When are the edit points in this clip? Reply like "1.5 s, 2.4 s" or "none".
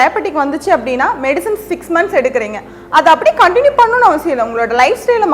none